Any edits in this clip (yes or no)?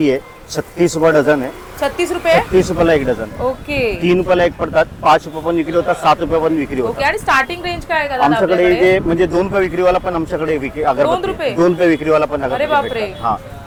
no